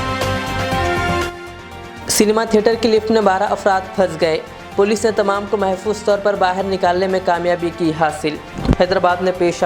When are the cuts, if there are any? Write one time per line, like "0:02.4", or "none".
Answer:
0:01.2